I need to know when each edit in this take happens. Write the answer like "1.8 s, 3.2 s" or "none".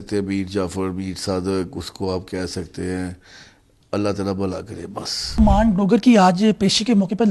5.4 s